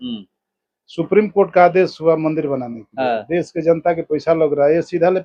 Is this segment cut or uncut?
uncut